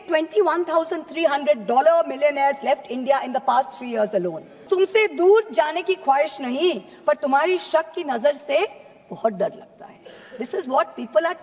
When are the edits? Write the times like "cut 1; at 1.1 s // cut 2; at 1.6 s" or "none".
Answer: cut 1; at 4.6 s